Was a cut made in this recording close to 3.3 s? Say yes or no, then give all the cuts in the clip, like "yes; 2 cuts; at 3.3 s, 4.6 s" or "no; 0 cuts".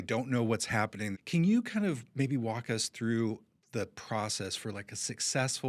no; 1 cut; at 1.2 s